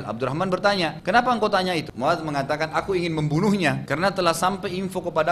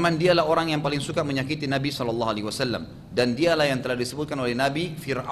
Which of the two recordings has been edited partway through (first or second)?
first